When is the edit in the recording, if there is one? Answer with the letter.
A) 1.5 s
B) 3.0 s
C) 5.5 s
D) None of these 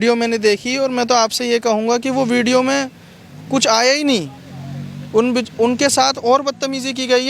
D